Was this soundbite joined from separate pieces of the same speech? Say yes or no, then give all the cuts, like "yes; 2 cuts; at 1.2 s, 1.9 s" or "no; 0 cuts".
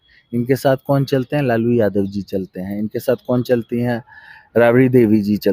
no; 0 cuts